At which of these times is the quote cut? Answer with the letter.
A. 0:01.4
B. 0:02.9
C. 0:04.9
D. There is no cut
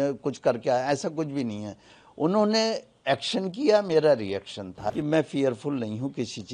C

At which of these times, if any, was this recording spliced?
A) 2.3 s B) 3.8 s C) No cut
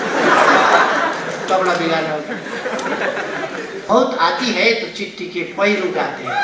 B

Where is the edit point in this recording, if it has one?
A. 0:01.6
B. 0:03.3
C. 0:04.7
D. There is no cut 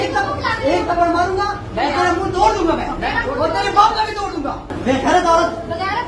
C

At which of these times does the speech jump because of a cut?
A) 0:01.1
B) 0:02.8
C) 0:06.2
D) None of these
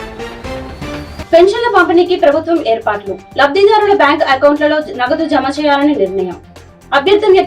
A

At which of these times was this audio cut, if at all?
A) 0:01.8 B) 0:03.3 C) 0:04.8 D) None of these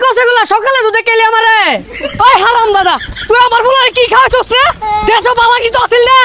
A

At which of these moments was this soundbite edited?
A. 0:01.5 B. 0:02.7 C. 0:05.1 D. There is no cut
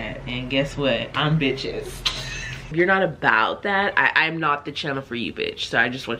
B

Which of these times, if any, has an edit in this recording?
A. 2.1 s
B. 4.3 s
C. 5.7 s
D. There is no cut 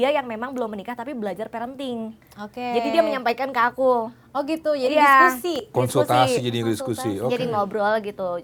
D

